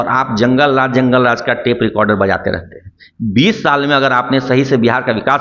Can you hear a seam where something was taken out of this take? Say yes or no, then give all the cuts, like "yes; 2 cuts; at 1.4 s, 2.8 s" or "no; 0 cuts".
no; 0 cuts